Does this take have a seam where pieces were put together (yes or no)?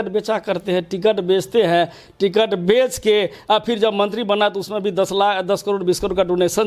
no